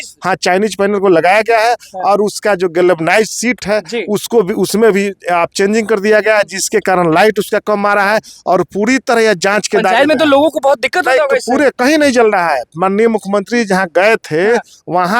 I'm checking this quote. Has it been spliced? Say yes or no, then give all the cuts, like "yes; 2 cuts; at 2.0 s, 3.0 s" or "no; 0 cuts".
no; 0 cuts